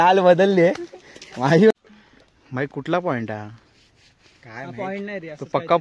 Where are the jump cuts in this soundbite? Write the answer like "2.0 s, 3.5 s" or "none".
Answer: 1.7 s